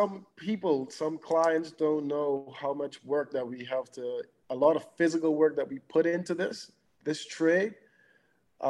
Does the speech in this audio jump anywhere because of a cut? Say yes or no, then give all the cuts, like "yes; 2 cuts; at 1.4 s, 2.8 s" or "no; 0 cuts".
no; 0 cuts